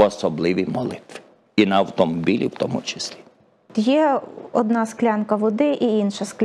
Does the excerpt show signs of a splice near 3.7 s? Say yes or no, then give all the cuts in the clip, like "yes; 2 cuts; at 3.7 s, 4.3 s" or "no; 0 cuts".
yes; 1 cut; at 3.7 s